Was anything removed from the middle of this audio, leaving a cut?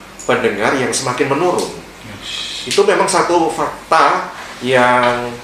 no; 0 cuts

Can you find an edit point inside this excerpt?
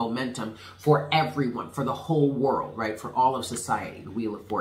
no; 0 cuts

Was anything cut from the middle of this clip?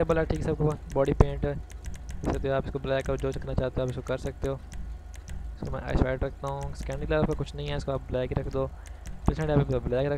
no; 0 cuts

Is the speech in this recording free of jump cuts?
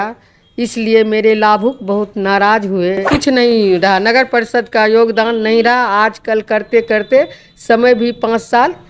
no; 1 cut; at 3.0 s

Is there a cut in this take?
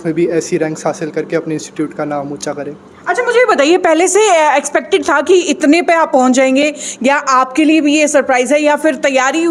no; 0 cuts

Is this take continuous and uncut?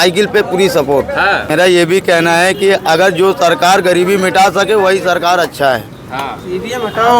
no; 1 cut; at 1.4 s

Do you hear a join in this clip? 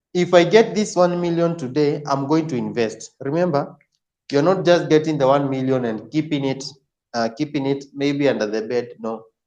no; 0 cuts

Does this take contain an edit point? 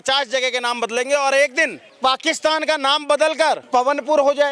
yes; 2 cuts; at 1.9 s, 3.6 s

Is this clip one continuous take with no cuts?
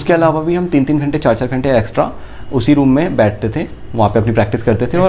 yes; 0 cuts

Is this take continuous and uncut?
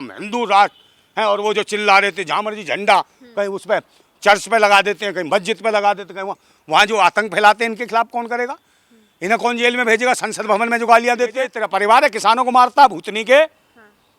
no; 1 cut; at 11.6 s

